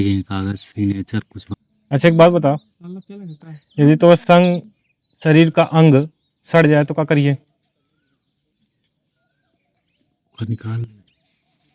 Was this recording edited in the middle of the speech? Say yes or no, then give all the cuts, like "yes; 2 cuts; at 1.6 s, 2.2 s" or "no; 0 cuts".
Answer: yes; 1 cut; at 1.4 s